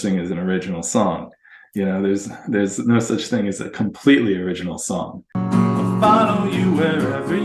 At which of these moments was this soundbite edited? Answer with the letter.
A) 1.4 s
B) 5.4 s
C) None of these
B